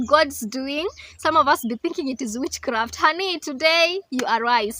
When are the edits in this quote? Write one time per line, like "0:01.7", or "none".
none